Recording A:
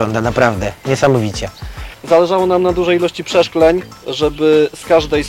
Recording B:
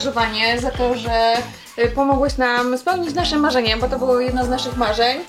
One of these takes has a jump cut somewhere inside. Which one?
A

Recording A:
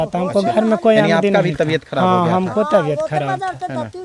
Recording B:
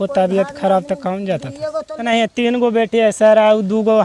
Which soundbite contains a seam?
B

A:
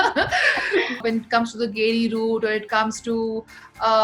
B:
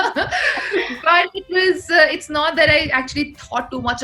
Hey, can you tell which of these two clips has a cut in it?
A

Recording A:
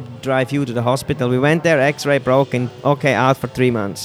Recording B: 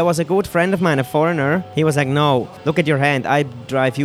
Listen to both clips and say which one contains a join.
B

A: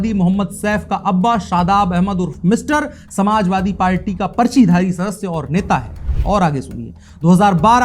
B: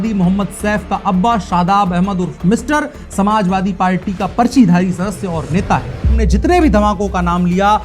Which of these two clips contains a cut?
B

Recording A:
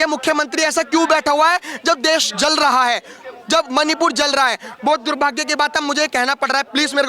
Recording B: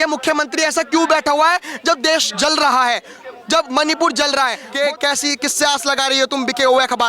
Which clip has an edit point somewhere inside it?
B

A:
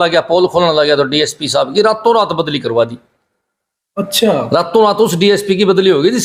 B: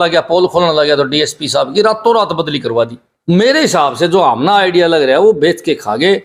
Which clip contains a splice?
B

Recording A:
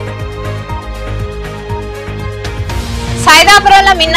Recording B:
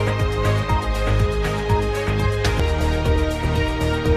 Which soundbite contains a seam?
A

